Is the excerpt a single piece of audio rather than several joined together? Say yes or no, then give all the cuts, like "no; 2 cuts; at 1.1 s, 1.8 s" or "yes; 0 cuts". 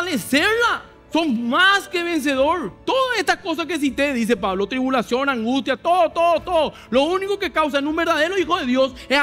no; 2 cuts; at 0.9 s, 2.7 s